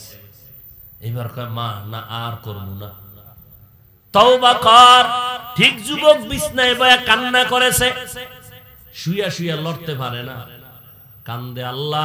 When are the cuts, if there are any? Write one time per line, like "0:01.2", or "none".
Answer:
0:05.4